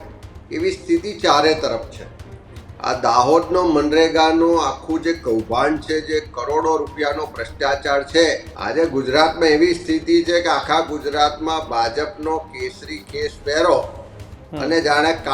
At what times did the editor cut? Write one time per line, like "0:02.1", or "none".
0:08.5

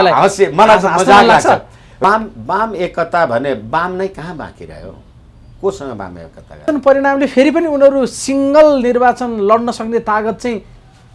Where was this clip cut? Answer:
0:02.0
0:06.7

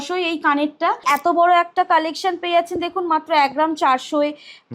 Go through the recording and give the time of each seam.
0:01.0

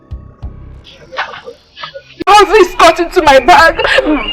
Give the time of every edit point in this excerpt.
0:02.3

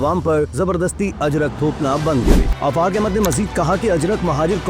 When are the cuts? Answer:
0:02.5

